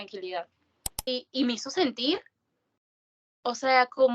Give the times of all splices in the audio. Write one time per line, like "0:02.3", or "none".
0:01.1

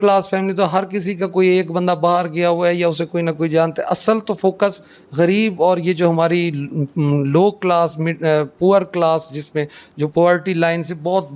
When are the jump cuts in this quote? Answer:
none

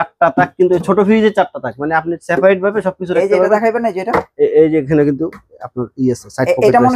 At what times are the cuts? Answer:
none

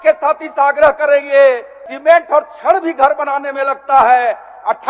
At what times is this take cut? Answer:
0:01.9

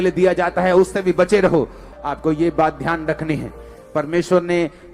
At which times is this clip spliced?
0:01.8

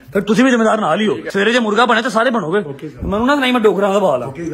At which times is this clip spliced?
0:01.2

